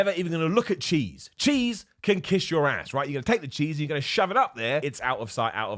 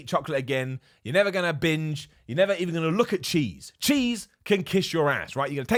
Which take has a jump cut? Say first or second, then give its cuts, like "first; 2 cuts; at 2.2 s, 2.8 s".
first; 1 cut; at 4.8 s